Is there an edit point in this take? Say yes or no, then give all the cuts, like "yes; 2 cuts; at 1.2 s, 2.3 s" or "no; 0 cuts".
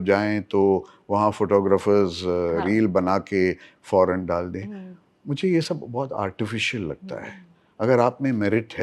no; 0 cuts